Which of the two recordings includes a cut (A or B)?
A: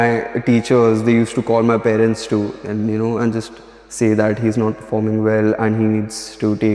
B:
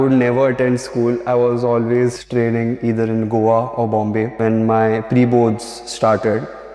B